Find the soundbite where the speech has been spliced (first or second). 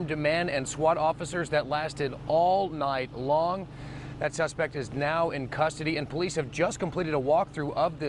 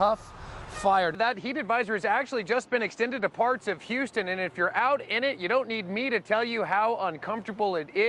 second